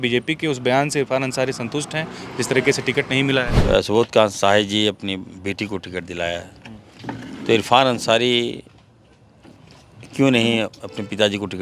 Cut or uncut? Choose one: cut